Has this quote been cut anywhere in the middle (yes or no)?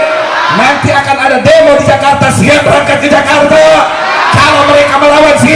no